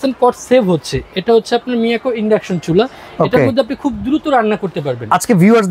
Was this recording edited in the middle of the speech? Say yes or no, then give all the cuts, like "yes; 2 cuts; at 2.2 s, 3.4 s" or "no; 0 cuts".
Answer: no; 0 cuts